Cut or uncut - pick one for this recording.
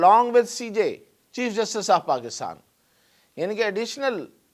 uncut